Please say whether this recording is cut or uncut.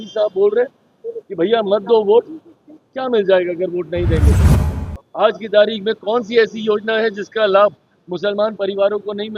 uncut